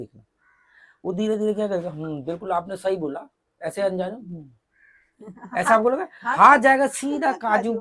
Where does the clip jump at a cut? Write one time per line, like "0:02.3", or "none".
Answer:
none